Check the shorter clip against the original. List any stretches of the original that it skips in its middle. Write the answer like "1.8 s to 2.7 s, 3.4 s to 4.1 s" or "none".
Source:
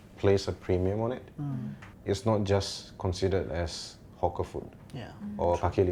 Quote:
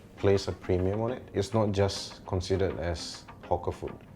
1.2 s to 2.0 s